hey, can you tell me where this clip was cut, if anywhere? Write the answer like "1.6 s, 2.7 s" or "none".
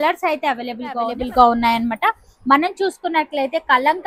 1.2 s